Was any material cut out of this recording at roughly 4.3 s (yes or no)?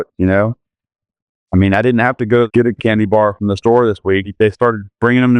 yes